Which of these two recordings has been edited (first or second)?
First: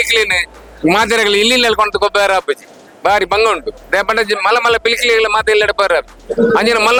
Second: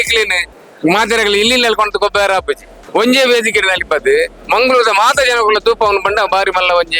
second